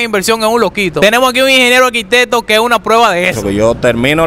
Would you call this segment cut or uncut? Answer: cut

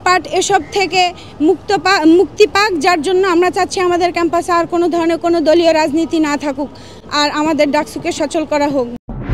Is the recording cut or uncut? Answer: uncut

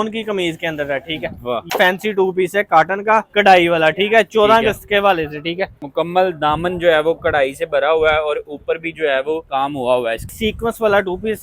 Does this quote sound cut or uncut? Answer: cut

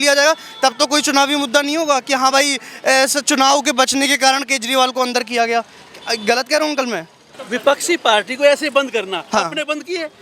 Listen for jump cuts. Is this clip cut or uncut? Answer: cut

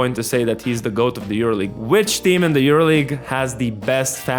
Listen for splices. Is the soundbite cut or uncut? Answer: cut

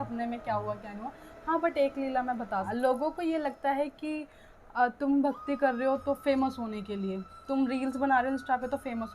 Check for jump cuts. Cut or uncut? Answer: cut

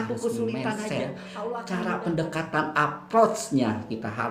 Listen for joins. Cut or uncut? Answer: cut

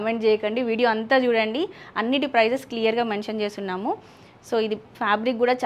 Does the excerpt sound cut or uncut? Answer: uncut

